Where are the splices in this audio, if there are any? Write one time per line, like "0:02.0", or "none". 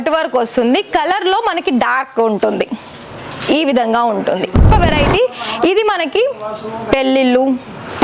0:04.7